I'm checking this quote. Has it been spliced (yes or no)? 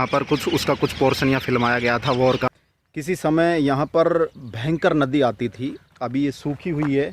yes